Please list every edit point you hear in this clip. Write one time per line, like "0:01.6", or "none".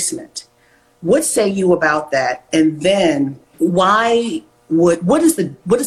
0:03.4